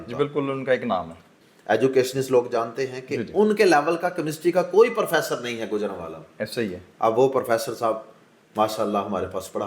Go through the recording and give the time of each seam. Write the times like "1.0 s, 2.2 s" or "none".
1.3 s